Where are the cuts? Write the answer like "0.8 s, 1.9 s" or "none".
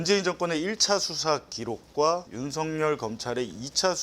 2.3 s